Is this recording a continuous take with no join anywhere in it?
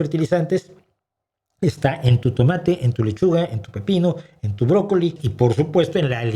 no; 1 cut; at 5.2 s

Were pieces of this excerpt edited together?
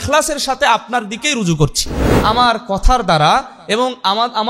yes; 1 cut; at 2.1 s

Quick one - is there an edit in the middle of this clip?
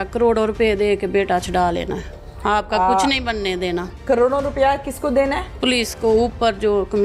no; 0 cuts

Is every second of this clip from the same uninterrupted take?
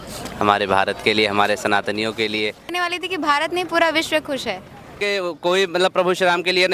no; 2 cuts; at 2.8 s, 5.0 s

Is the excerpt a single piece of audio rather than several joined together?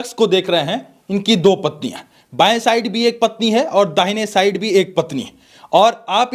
yes; 0 cuts

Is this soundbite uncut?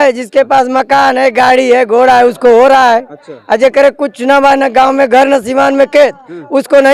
yes; 0 cuts

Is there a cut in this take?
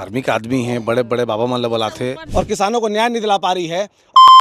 yes; 1 cut; at 2.2 s

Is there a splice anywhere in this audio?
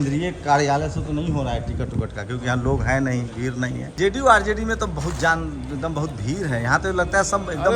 yes; 1 cut; at 3.8 s

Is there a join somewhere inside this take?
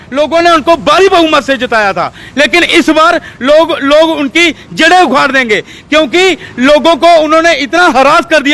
no; 0 cuts

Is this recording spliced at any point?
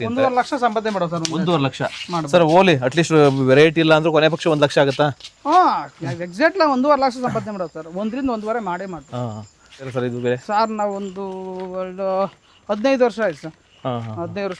yes; 1 cut; at 9.9 s

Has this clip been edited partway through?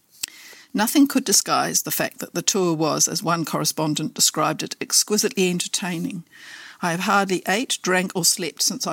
no; 0 cuts

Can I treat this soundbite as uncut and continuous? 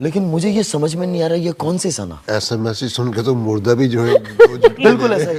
yes; 0 cuts

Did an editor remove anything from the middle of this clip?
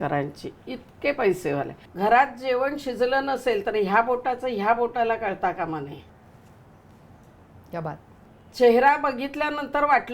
yes; 2 cuts; at 1.9 s, 6.1 s

